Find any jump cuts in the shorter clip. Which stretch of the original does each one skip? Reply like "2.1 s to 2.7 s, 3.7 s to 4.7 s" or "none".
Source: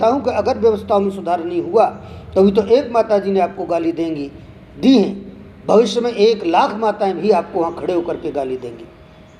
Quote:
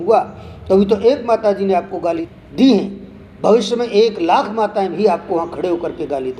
3.9 s to 4.5 s